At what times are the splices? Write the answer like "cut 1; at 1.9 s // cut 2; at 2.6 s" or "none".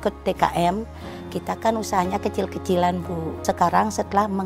cut 1; at 3.4 s